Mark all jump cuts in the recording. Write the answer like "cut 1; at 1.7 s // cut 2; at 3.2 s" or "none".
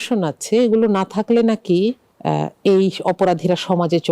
cut 1; at 2.1 s